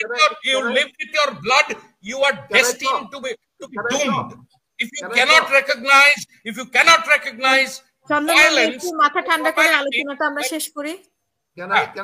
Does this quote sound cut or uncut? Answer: uncut